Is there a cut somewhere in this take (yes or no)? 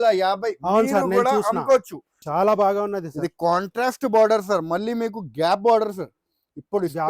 yes